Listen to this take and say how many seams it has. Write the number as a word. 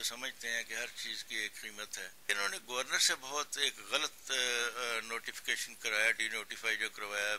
one